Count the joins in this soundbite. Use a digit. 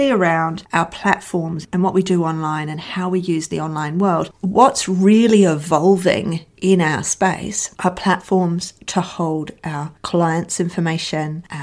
2